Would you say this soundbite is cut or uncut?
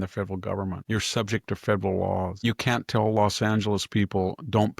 cut